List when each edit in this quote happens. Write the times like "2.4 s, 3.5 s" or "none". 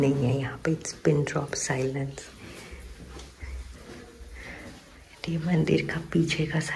none